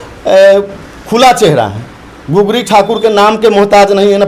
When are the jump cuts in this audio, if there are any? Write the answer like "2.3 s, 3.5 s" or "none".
none